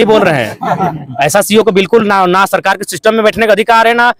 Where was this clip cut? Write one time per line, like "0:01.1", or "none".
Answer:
none